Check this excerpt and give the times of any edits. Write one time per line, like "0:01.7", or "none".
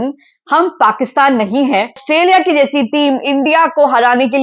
0:02.0